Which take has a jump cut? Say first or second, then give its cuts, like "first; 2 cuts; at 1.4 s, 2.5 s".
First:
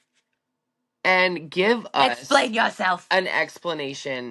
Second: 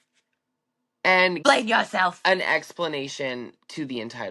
second; 1 cut; at 1.4 s